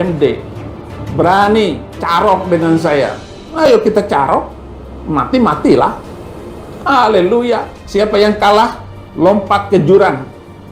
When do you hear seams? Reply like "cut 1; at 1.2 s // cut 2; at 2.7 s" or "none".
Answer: cut 1; at 7.8 s